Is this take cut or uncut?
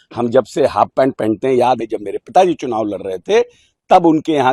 cut